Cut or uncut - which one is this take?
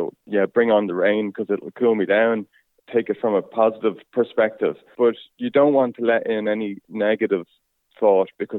cut